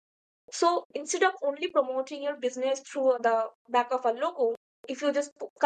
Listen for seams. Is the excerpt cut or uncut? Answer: cut